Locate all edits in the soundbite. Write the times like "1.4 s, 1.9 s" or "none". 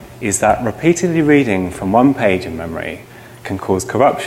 none

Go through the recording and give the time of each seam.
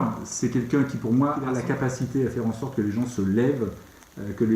1.4 s

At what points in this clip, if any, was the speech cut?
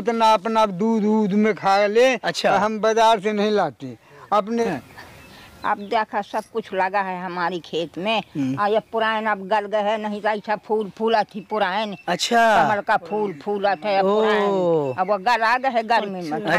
4.7 s

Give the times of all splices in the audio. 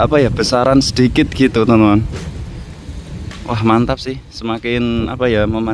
none

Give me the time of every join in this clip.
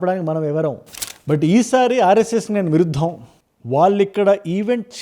0.9 s

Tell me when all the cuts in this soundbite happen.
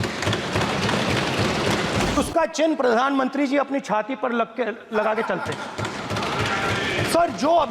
2.2 s

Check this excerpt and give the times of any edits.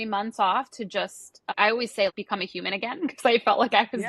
2.2 s

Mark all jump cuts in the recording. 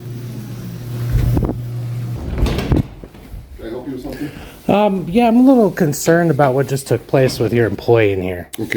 2.1 s

